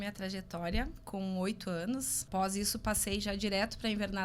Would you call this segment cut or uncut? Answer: cut